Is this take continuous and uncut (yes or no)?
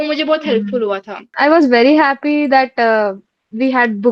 no